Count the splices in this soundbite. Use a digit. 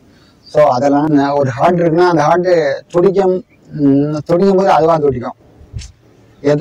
1